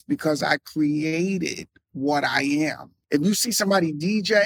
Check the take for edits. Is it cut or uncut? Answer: cut